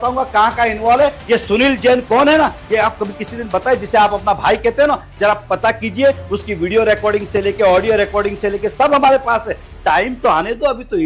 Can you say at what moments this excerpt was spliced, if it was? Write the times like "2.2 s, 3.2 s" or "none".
none